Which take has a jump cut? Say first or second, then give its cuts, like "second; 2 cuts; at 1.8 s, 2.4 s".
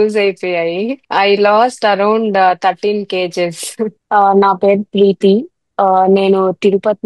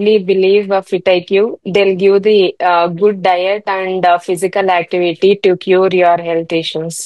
first; 2 cuts; at 1.0 s, 4.0 s